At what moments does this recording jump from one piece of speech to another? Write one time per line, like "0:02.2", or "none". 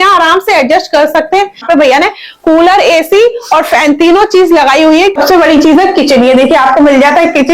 0:01.6
0:05.1